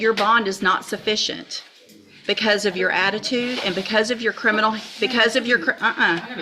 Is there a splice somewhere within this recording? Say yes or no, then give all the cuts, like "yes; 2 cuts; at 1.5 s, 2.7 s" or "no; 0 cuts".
no; 0 cuts